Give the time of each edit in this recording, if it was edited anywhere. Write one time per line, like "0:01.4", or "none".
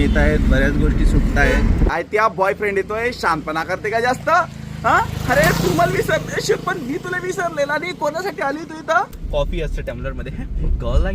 0:01.9
0:09.2